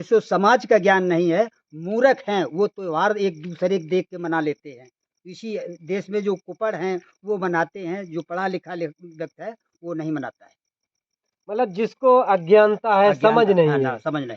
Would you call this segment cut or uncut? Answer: uncut